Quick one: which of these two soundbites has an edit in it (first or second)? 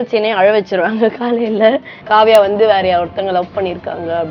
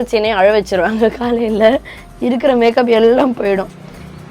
first